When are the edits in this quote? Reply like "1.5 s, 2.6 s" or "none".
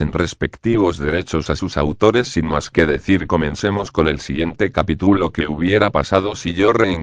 4.9 s